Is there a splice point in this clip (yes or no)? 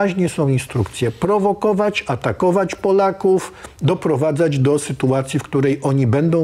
no